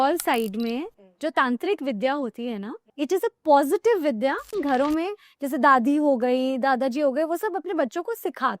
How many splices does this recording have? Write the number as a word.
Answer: two